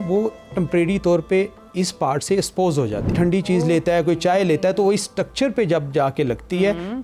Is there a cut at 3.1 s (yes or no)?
yes